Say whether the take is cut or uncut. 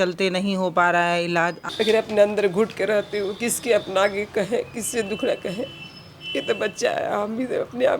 cut